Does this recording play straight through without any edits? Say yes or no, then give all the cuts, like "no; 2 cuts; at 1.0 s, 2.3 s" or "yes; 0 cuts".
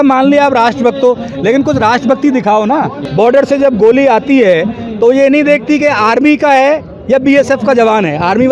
no; 1 cut; at 3.0 s